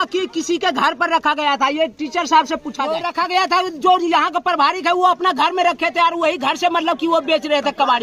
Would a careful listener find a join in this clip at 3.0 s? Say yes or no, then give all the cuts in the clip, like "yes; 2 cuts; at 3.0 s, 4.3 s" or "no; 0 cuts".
yes; 1 cut; at 3.0 s